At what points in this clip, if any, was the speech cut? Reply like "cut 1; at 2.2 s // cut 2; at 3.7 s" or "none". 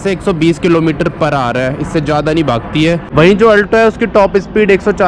cut 1; at 3.1 s